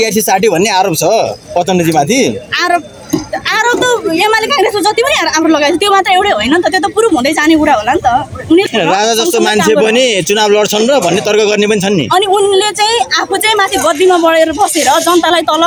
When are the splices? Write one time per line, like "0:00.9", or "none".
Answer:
0:08.7